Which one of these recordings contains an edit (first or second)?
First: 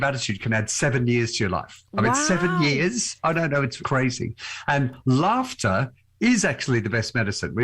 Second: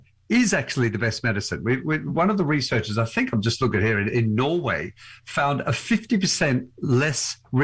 first